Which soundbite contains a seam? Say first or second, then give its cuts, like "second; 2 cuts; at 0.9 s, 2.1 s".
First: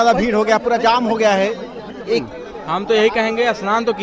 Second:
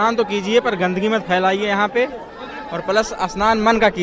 first; 1 cut; at 2.4 s